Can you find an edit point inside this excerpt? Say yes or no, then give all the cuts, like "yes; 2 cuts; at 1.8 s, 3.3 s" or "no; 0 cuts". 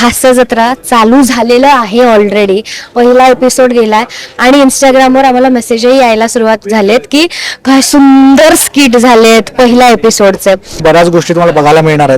yes; 1 cut; at 10.8 s